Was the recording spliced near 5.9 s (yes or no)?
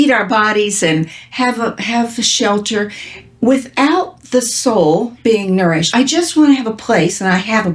yes